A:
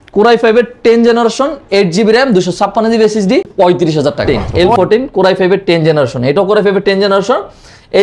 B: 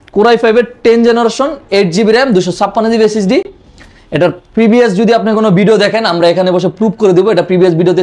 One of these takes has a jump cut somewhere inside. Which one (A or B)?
A